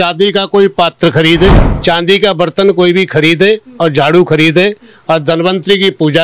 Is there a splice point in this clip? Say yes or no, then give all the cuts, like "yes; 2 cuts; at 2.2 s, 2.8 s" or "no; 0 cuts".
yes; 1 cut; at 1.7 s